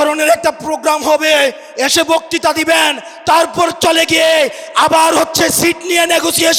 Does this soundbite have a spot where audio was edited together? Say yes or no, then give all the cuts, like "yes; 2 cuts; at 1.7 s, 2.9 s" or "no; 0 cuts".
no; 0 cuts